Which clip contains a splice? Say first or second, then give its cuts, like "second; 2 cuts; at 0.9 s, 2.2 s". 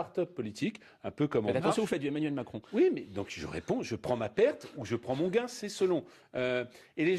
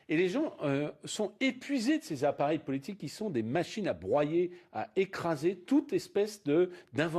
first; 1 cut; at 1.6 s